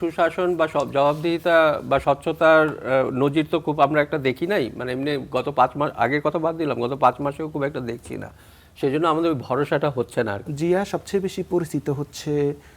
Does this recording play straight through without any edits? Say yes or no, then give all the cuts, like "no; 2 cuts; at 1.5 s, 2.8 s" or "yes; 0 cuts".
no; 1 cut; at 10.4 s